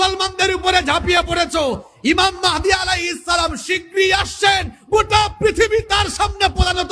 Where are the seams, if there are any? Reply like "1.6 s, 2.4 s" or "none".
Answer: none